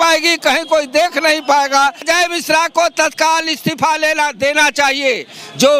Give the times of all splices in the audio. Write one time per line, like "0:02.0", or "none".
none